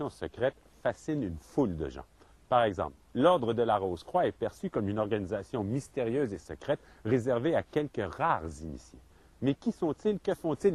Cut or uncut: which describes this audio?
uncut